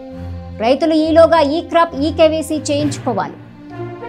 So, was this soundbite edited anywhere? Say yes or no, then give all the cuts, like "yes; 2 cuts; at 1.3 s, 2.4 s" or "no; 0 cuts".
no; 0 cuts